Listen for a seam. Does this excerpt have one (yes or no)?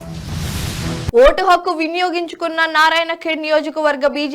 no